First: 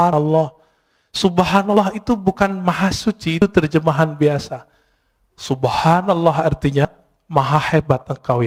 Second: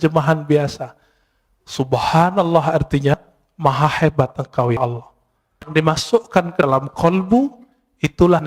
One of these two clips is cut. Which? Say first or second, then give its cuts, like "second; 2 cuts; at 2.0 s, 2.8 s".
second; 1 cut; at 5.7 s